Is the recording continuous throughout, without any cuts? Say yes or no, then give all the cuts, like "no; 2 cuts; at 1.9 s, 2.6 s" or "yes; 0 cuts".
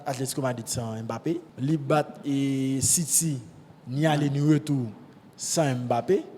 no; 1 cut; at 1.5 s